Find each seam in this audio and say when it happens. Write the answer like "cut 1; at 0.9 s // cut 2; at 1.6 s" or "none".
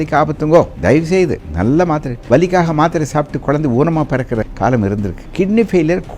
cut 1; at 1.1 s // cut 2; at 2.1 s // cut 3; at 4.5 s // cut 4; at 5.2 s